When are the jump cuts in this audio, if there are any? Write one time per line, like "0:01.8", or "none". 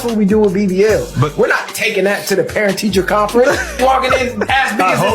0:02.8